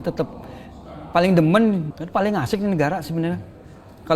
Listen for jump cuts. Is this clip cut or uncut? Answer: cut